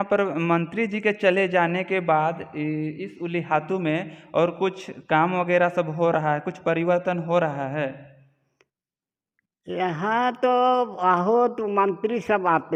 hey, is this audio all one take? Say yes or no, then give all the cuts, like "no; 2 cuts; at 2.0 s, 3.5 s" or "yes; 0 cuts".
yes; 0 cuts